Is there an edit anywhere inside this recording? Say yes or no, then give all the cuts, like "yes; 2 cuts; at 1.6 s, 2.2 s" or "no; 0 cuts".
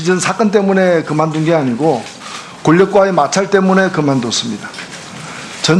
yes; 1 cut; at 3.6 s